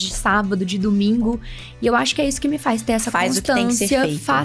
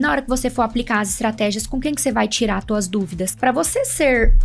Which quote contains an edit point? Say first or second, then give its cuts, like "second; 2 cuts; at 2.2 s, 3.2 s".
second; 1 cut; at 3.3 s